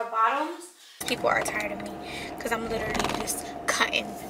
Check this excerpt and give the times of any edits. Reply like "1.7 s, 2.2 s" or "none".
1.0 s

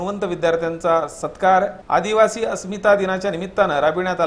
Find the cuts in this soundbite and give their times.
none

